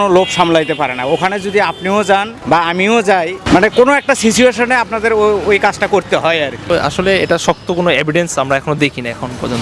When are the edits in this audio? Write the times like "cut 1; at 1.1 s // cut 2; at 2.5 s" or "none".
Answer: cut 1; at 2.3 s // cut 2; at 3.4 s // cut 3; at 6.6 s